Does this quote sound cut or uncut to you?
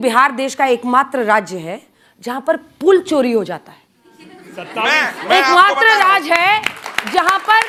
uncut